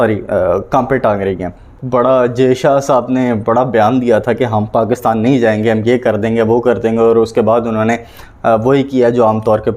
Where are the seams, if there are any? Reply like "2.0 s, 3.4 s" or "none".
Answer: 1.7 s